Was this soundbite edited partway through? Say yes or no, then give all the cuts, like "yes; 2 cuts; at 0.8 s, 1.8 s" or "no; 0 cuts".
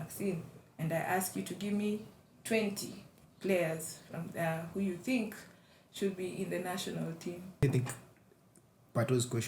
yes; 1 cut; at 7.6 s